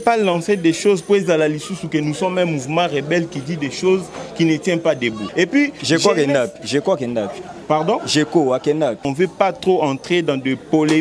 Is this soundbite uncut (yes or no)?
no